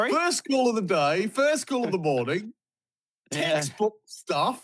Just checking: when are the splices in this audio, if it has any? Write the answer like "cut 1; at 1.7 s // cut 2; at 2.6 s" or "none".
none